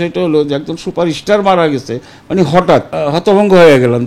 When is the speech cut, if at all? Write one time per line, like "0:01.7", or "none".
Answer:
0:02.9